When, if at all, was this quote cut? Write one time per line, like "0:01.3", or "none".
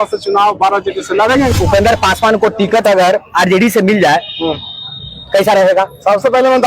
0:01.5